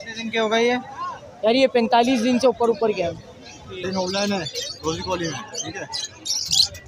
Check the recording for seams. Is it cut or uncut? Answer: cut